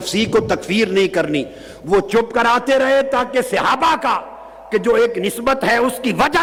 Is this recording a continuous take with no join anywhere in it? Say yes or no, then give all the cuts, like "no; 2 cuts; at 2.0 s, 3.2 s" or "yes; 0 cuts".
yes; 0 cuts